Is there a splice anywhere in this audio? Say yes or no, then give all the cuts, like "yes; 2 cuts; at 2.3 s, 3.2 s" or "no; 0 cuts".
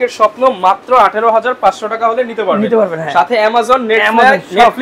no; 0 cuts